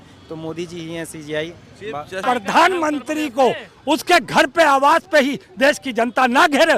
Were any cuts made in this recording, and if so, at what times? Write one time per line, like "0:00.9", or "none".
0:02.2